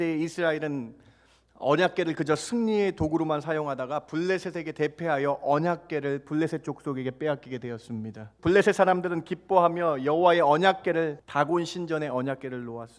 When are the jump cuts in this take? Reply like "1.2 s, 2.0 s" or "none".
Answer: 8.3 s, 11.2 s